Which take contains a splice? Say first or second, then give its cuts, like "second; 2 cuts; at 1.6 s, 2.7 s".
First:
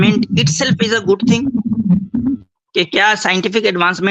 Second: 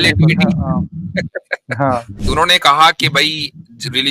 second; 1 cut; at 2.2 s